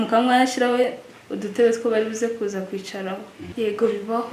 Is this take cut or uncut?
cut